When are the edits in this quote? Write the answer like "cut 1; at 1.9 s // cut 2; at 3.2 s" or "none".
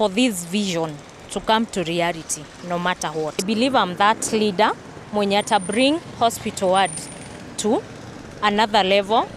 cut 1; at 3.5 s